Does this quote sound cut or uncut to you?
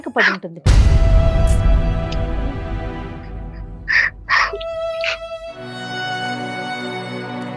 uncut